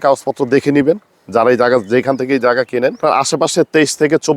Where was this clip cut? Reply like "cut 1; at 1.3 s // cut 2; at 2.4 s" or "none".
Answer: cut 1; at 3.0 s

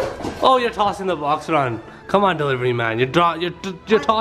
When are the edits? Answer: none

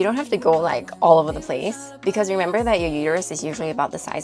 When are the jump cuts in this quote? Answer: none

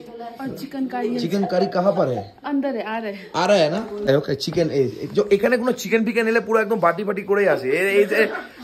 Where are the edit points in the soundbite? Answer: cut 1; at 4.1 s

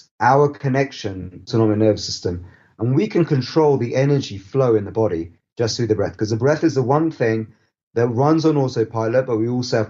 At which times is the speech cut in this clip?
none

